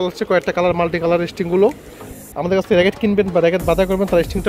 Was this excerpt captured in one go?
no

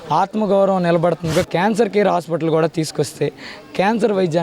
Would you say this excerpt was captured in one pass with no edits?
no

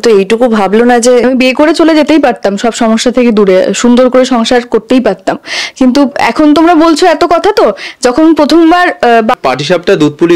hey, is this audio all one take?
no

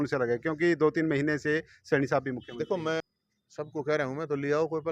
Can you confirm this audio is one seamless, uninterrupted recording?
no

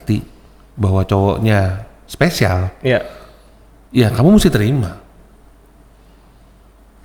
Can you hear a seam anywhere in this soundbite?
no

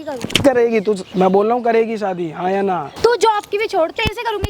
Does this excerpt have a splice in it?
yes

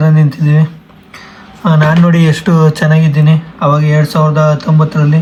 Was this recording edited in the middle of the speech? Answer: no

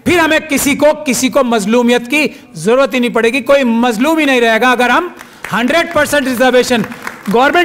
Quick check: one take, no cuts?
yes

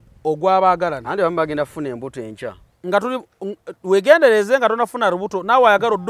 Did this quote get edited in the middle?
no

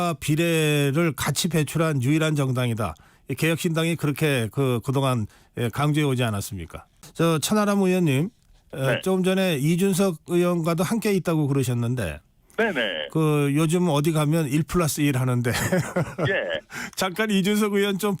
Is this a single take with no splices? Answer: no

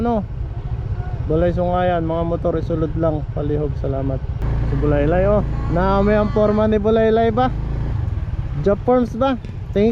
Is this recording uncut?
no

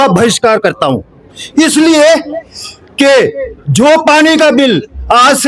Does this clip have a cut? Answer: no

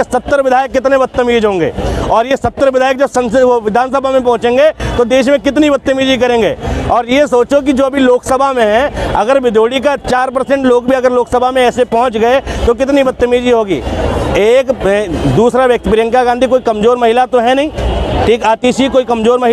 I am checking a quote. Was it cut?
no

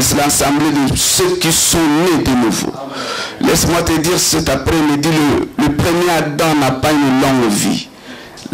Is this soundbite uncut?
yes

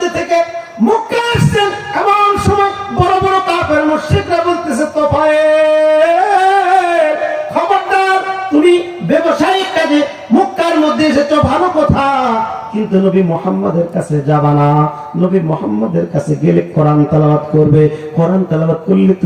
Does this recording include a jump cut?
no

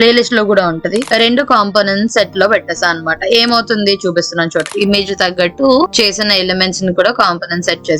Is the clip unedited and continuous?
no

